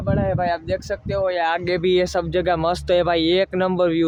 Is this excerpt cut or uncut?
uncut